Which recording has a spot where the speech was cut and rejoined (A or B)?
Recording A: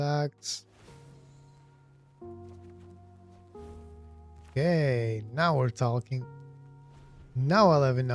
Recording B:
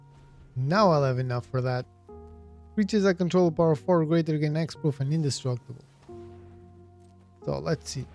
A